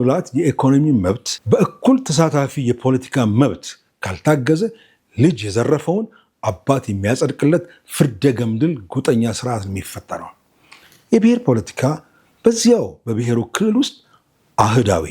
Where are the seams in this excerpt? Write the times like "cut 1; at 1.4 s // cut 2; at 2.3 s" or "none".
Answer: cut 1; at 1.3 s

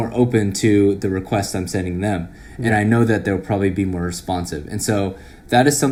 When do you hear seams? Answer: none

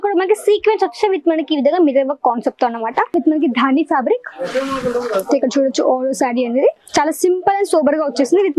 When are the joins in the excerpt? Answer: cut 1; at 3.1 s

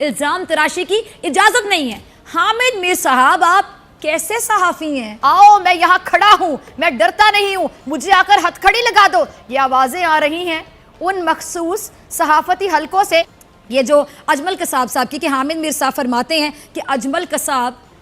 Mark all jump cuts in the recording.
cut 1; at 5.1 s // cut 2; at 13.4 s

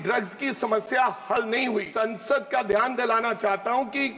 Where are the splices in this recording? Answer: cut 1; at 1.9 s

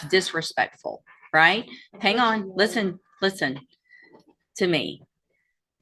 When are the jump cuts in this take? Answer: none

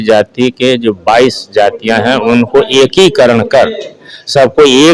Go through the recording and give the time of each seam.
none

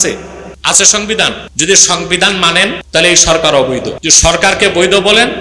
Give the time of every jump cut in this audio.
cut 1; at 1.5 s // cut 2; at 2.8 s // cut 3; at 4.0 s

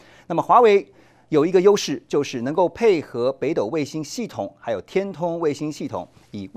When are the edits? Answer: none

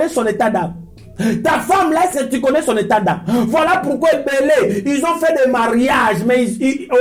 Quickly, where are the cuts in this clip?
none

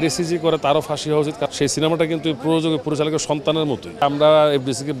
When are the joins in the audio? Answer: cut 1; at 1.5 s // cut 2; at 4.0 s

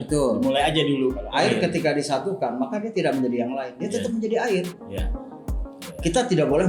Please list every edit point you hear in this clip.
cut 1; at 1.2 s

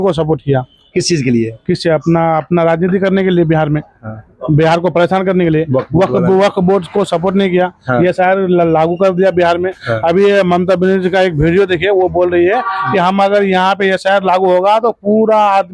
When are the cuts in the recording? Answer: none

